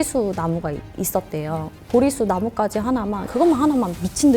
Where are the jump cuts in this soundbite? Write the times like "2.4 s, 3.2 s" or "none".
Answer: 1.8 s, 3.2 s